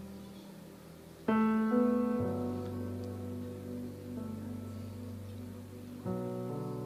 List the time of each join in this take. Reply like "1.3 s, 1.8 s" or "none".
none